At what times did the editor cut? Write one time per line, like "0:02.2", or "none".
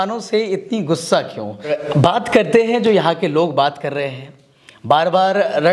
0:01.7